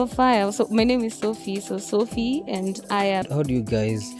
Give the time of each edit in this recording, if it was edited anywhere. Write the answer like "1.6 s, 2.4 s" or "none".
3.2 s